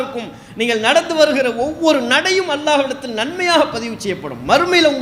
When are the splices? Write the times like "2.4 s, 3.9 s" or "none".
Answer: none